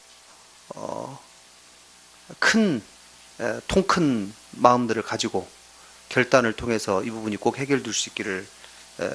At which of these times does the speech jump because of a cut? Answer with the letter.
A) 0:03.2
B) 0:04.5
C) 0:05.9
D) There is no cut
B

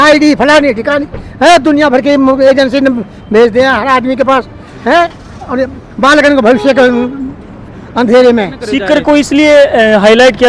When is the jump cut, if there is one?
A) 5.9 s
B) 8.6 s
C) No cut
B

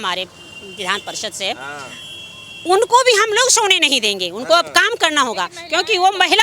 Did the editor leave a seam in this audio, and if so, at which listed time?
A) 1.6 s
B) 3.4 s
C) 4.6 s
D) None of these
D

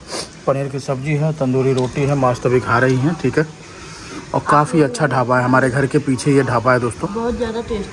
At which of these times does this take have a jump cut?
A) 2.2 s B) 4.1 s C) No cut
C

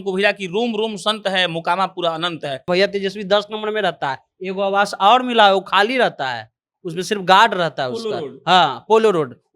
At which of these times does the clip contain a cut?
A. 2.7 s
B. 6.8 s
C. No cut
A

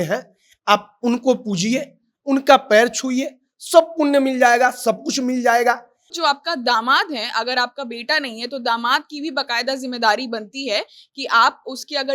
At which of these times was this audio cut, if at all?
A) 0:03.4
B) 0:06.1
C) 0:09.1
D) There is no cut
B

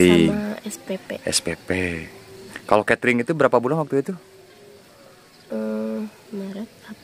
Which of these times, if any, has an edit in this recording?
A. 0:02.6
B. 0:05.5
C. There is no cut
A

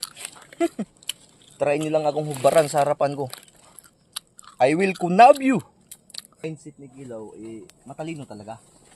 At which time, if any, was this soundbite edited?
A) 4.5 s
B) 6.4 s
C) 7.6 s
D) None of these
B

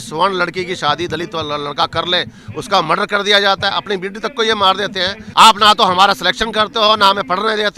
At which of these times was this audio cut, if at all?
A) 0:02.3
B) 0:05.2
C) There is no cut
B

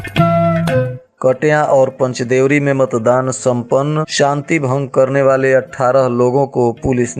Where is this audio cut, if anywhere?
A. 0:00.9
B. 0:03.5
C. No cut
A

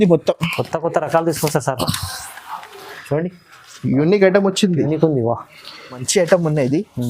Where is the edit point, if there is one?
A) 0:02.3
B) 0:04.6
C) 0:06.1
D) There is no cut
C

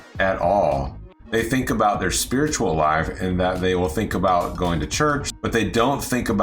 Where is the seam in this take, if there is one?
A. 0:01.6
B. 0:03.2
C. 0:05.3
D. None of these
C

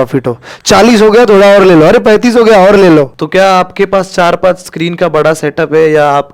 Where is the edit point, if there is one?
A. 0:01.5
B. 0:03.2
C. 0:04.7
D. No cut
B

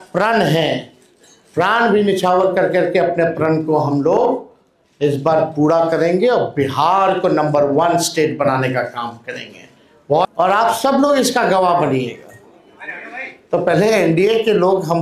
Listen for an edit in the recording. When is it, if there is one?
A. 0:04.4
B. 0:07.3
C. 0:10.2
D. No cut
C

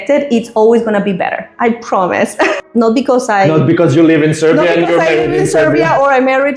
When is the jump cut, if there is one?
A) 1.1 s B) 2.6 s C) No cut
B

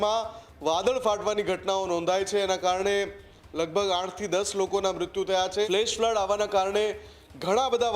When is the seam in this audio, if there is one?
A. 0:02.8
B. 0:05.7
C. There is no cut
B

